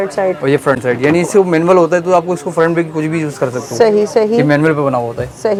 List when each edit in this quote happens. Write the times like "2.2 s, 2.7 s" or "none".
none